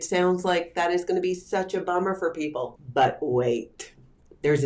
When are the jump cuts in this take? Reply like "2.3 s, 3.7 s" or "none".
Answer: 2.8 s